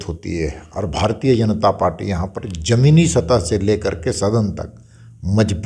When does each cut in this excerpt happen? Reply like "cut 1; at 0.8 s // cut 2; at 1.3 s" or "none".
none